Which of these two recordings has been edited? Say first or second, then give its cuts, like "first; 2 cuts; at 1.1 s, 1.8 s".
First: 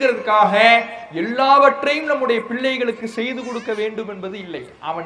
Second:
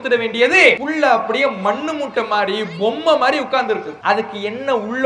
second; 2 cuts; at 0.8 s, 3.9 s